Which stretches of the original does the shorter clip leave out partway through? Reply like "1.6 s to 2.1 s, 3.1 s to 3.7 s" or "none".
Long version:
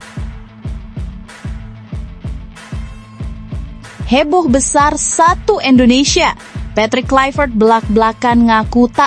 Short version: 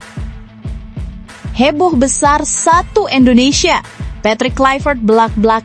1.5 s to 4.1 s